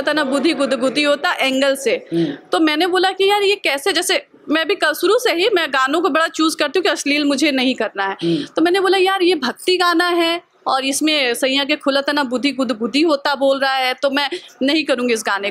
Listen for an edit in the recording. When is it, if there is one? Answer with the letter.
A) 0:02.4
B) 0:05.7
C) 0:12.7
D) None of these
D